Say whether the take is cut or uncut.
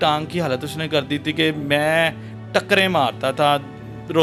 uncut